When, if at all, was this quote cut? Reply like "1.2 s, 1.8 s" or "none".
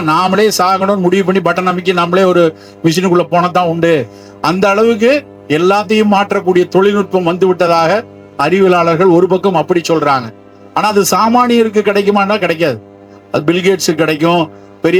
none